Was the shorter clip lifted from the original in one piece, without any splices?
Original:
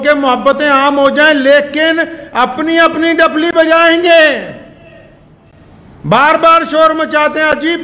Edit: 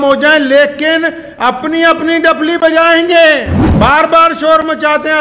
no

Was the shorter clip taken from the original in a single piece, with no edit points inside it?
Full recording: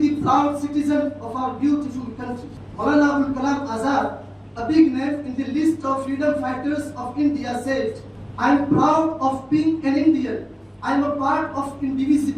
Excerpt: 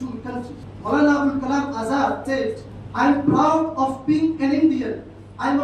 no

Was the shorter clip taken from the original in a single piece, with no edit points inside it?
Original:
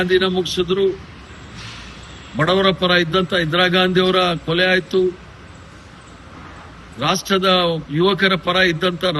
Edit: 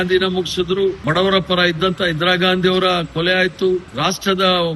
no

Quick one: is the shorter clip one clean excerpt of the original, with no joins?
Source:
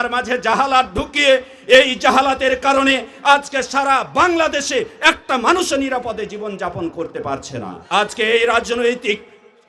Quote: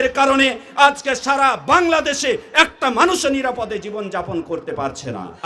yes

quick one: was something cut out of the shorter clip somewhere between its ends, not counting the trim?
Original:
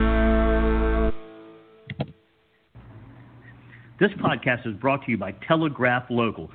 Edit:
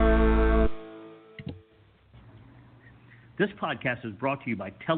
yes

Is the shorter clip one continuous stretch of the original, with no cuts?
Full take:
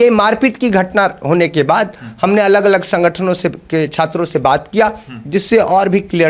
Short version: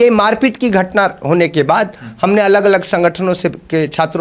yes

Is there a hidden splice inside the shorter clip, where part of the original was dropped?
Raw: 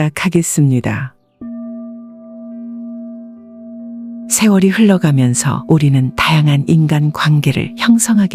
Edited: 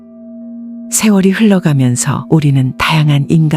yes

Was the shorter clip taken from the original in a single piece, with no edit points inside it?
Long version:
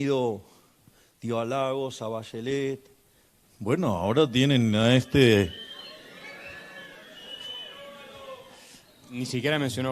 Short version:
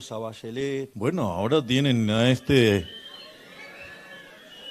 no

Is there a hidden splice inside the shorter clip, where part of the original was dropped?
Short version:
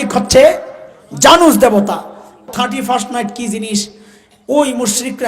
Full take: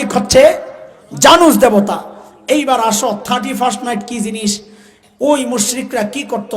yes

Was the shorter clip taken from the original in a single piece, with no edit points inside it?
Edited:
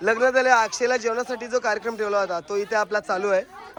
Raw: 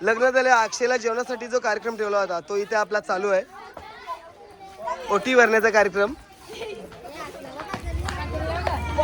yes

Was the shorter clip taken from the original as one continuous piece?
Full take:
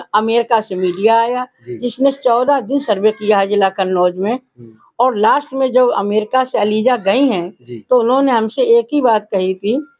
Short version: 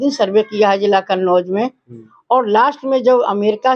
yes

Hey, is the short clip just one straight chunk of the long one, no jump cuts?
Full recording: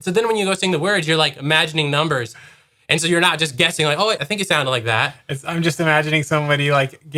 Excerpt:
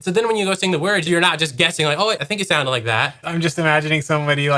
no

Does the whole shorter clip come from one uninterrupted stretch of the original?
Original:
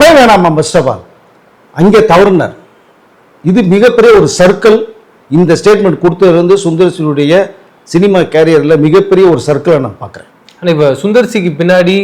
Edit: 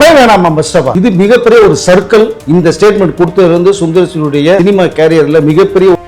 no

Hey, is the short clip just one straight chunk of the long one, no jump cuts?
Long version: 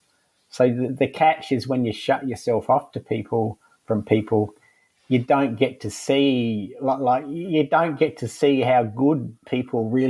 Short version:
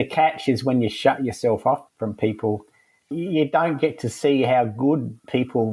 no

